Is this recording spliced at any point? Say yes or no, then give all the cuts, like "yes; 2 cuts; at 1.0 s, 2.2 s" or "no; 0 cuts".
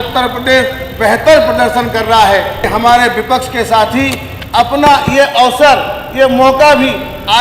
yes; 1 cut; at 2.6 s